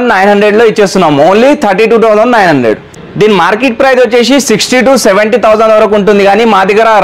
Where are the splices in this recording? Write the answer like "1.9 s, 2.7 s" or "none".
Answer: 3.0 s